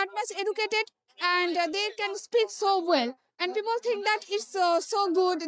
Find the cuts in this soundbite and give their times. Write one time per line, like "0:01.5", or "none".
none